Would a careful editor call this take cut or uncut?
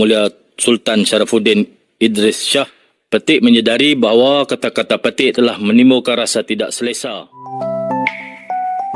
cut